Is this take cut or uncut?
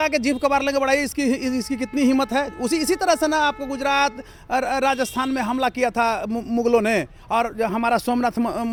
uncut